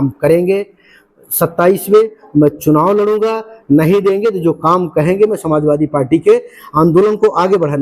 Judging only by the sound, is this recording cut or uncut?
uncut